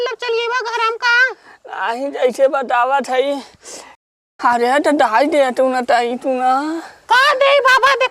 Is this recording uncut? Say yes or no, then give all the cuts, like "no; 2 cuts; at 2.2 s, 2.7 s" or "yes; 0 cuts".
no; 1 cut; at 4.2 s